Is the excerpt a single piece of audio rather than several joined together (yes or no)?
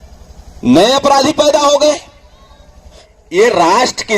no